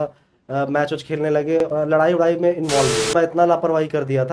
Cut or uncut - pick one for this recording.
cut